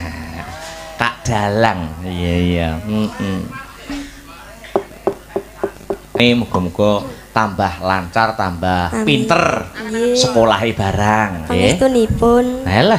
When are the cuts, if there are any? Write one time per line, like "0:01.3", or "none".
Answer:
0:06.2